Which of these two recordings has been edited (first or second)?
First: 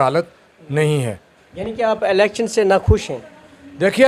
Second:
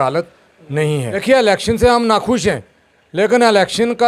second